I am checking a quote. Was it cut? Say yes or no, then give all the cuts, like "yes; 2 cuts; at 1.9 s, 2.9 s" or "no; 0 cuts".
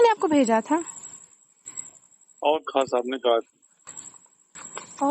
yes; 1 cut; at 2.9 s